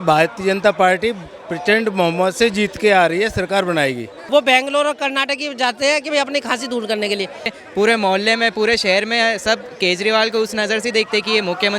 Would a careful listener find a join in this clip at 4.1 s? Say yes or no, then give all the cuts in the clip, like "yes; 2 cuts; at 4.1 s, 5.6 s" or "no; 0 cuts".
yes; 2 cuts; at 4.1 s, 7.6 s